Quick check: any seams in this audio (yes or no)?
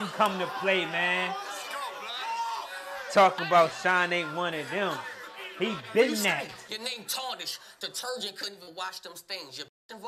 yes